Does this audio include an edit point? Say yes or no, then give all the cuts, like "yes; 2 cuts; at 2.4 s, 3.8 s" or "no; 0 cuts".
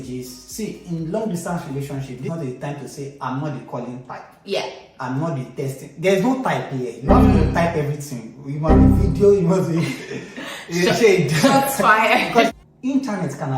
yes; 1 cut; at 12.5 s